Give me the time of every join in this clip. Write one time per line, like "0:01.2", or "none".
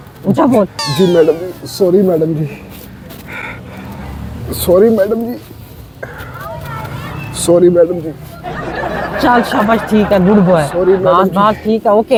none